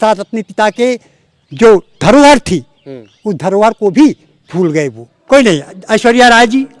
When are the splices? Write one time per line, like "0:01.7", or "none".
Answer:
0:05.1